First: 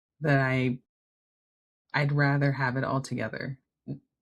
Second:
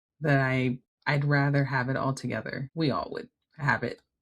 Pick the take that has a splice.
second; 2 cuts; at 0.9 s, 2.6 s

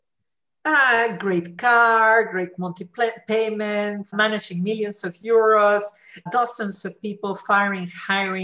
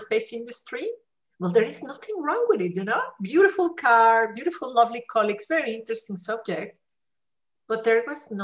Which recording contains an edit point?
first; 2 cuts; at 4.1 s, 6.3 s

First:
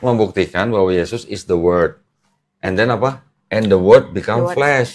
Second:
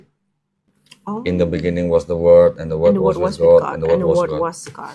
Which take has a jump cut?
second; 1 cut; at 1.0 s

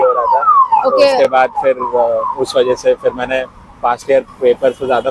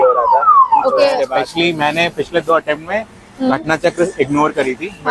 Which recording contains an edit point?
second; 1 cut; at 1.3 s

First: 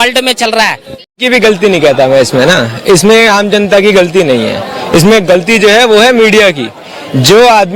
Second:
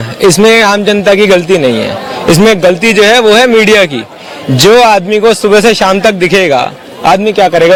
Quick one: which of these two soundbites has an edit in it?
first; 1 cut; at 1.2 s

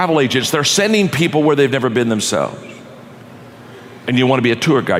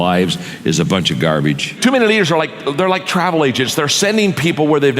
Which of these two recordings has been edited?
second; 1 cut; at 1.7 s

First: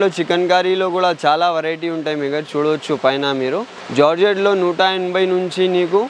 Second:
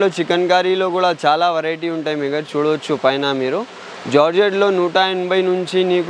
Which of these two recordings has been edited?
first; 1 cut; at 3.8 s

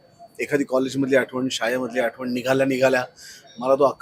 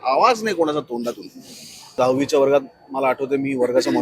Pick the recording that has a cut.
second; 1 cut; at 2.0 s

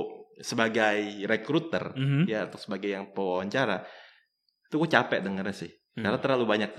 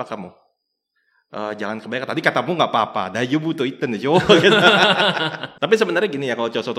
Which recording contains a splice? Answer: second; 1 cut; at 5.4 s

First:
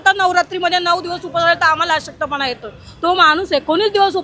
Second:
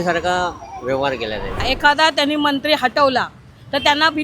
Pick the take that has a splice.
second; 1 cut; at 1.6 s

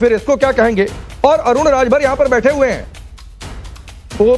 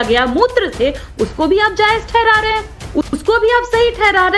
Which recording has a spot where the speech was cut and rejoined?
second; 1 cut; at 2.8 s

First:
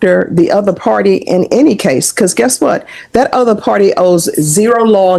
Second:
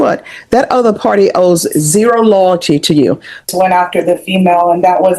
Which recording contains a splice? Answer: second; 1 cut; at 3.7 s

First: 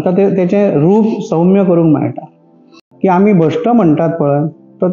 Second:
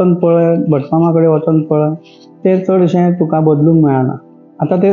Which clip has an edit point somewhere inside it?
first; 1 cut; at 2.9 s

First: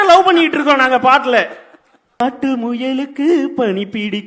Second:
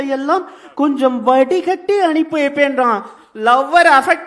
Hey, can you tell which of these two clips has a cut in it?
first; 1 cut; at 2.2 s

